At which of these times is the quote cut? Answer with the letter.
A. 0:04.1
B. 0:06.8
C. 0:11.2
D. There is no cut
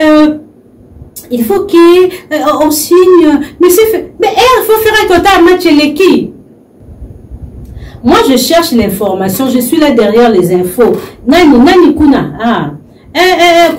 B